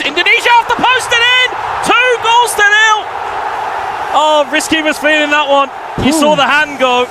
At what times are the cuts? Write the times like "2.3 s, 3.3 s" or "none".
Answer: none